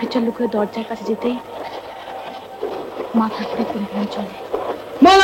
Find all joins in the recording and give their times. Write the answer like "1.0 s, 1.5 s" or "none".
none